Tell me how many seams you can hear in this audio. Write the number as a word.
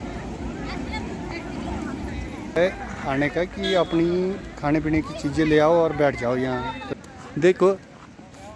two